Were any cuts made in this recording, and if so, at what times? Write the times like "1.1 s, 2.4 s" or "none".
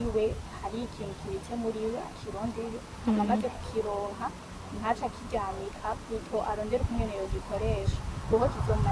none

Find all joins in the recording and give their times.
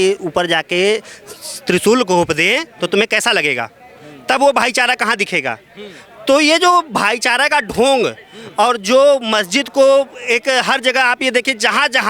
none

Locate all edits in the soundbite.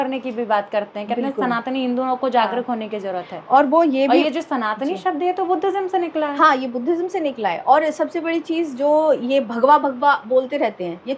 none

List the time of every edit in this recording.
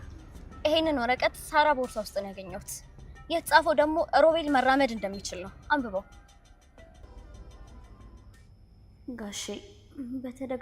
7.0 s

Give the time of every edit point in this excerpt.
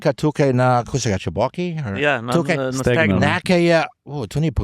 none

